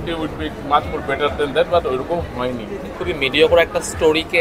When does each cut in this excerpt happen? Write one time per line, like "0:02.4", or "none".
0:03.0